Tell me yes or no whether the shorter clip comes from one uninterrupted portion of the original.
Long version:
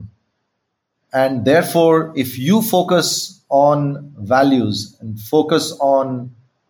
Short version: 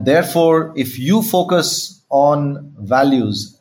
yes